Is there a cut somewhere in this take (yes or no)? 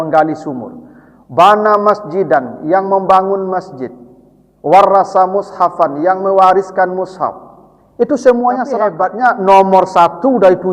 yes